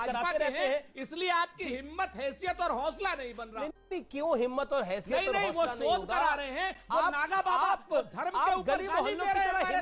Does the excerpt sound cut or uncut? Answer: uncut